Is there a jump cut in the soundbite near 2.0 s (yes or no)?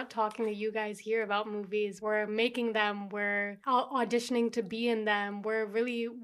yes